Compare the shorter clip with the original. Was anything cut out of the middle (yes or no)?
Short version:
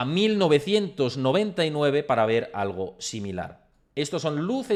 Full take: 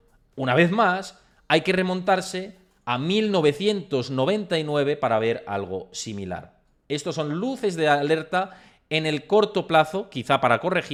no